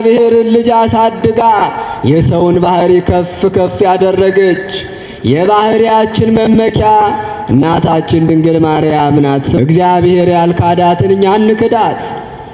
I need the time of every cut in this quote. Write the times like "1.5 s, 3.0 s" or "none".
9.6 s